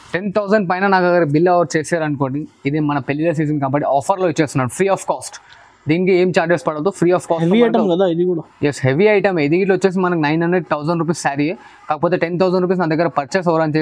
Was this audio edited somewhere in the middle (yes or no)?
no